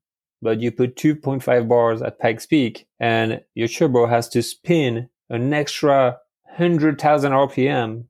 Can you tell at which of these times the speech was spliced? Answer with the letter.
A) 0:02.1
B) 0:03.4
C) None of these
B